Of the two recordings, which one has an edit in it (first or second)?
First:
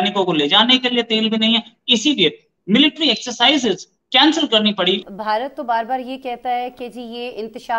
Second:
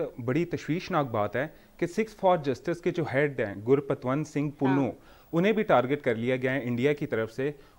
first